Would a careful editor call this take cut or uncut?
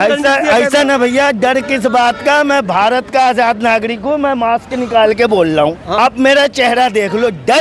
cut